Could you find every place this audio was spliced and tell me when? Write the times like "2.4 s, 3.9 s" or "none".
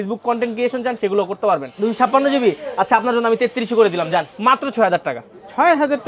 1.7 s, 4.3 s